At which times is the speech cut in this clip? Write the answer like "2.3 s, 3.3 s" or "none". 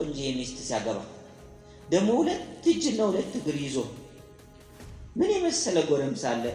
none